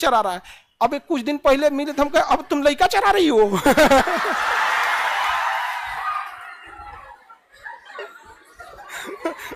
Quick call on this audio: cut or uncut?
uncut